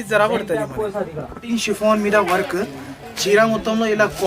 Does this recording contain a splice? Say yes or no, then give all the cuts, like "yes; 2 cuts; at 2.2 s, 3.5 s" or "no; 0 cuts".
yes; 1 cut; at 1.4 s